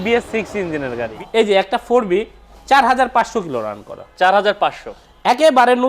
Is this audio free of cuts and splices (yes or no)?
no